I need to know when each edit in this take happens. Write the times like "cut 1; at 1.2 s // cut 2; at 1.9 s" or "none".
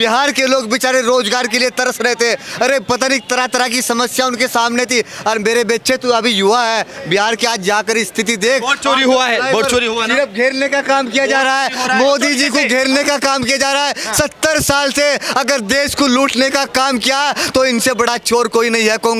none